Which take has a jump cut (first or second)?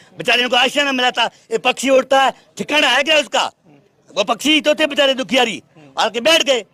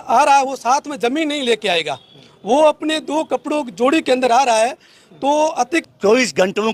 second